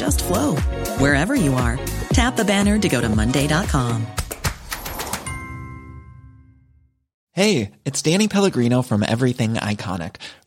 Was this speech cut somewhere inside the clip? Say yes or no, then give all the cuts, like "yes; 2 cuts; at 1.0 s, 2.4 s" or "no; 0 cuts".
no; 0 cuts